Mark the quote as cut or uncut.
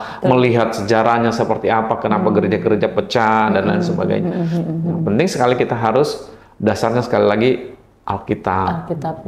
uncut